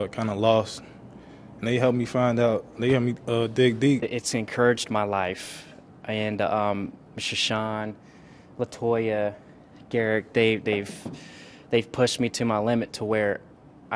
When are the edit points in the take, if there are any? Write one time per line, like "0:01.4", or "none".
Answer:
0:04.1